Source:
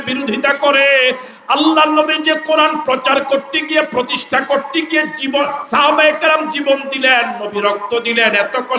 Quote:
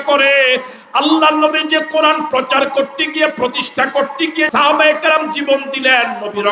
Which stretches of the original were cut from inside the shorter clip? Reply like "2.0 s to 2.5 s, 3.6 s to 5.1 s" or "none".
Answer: 5.0 s to 5.7 s